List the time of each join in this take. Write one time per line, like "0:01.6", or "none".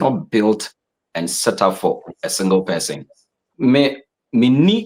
0:03.5